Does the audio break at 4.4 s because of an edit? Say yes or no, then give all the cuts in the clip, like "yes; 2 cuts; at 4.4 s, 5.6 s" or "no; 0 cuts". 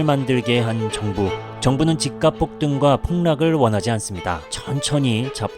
yes; 1 cut; at 4.4 s